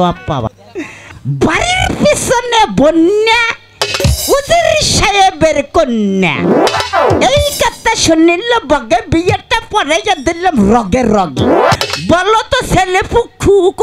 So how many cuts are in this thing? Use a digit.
2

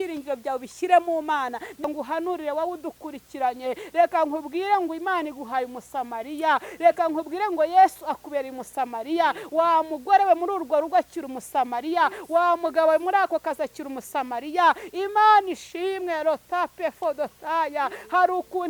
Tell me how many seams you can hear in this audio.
1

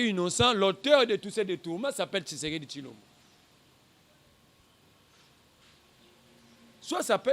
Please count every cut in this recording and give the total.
0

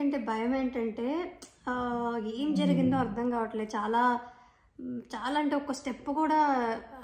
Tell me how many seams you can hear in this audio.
0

